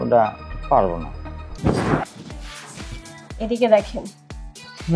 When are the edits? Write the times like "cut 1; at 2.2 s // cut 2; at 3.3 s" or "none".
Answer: cut 1; at 1.5 s